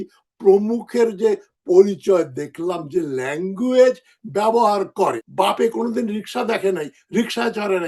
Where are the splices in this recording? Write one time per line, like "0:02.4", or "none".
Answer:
0:05.2